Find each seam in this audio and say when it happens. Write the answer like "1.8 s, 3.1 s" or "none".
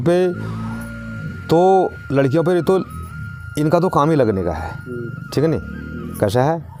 none